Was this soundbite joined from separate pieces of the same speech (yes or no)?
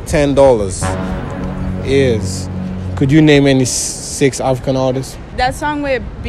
yes